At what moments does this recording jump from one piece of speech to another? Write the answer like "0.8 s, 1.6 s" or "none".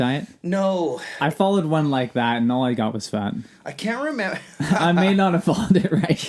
none